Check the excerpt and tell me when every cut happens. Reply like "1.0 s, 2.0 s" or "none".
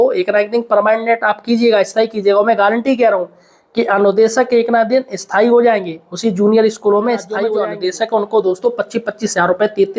7.5 s